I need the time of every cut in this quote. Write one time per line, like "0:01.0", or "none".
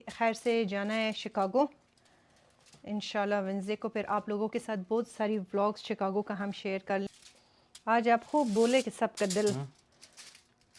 0:07.1